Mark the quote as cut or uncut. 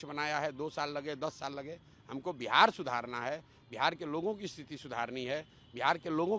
uncut